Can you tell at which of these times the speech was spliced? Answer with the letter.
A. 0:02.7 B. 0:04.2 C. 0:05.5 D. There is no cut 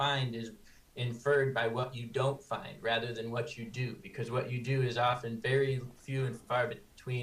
A